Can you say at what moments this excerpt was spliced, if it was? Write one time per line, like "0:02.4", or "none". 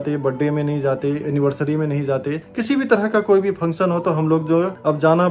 none